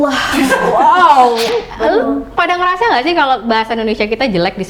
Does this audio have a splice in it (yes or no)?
yes